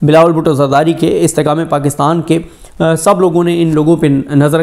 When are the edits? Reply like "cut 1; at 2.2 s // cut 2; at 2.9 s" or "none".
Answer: none